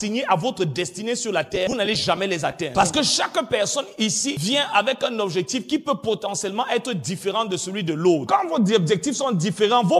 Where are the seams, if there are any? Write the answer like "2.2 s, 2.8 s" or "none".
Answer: 1.7 s, 2.7 s, 4.4 s, 8.2 s